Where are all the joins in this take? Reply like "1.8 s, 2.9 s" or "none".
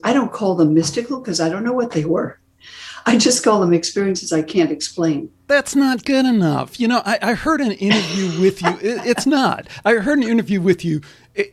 5.4 s